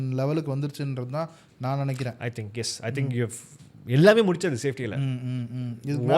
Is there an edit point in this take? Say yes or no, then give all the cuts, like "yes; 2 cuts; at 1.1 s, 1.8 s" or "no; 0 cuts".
no; 0 cuts